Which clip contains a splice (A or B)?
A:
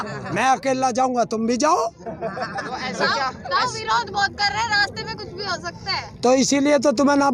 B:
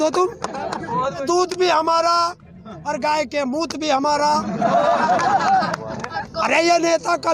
B